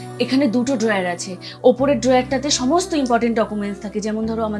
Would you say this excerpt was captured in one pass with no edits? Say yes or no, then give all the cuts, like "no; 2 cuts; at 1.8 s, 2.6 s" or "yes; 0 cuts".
yes; 0 cuts